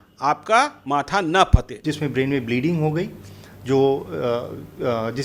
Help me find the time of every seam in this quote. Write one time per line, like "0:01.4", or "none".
0:01.8